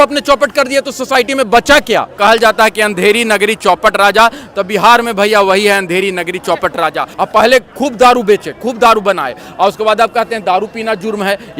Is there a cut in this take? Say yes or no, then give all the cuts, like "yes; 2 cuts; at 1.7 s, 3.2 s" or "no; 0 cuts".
yes; 2 cuts; at 2.1 s, 7.1 s